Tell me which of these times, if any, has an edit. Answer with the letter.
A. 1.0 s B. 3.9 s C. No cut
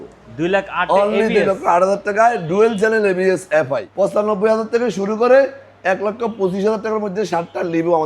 B